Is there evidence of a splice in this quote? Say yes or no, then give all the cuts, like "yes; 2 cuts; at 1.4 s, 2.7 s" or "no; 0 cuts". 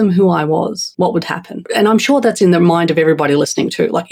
yes; 2 cuts; at 0.8 s, 1.6 s